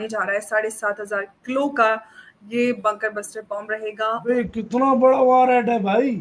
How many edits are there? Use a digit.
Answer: 1